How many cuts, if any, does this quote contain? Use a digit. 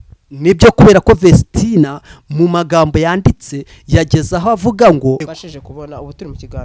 1